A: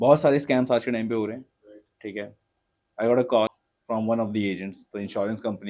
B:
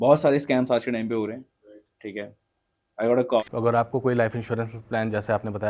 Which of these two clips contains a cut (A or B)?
B